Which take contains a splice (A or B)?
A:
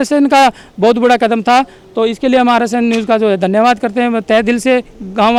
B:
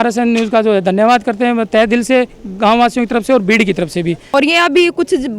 B